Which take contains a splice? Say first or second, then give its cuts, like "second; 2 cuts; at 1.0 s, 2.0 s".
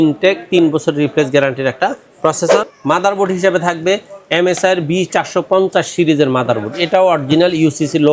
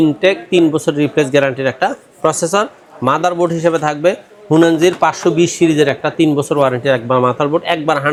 first; 1 cut; at 2.7 s